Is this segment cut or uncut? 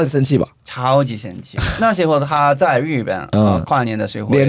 cut